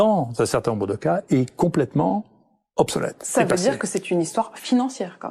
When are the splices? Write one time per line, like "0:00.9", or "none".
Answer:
none

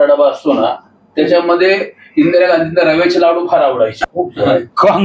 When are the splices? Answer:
0:04.0

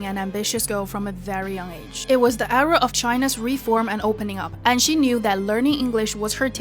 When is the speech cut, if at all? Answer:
0:01.5

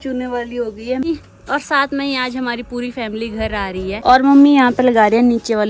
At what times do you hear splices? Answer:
0:01.0
0:04.0

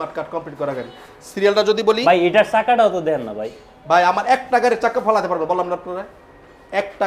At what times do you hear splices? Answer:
none

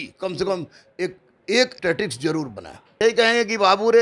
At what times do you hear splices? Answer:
0:01.7
0:02.9

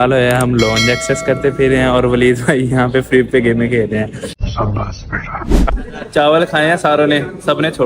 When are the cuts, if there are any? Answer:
0:05.7

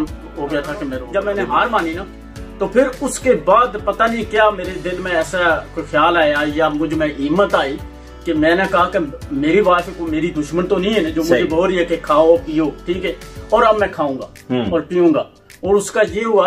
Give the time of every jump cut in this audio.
0:00.9

